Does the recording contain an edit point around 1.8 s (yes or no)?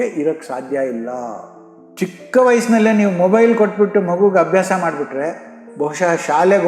yes